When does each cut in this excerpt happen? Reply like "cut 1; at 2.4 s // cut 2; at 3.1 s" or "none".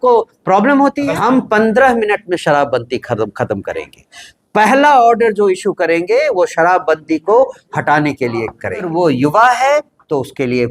cut 1; at 1.1 s // cut 2; at 8.9 s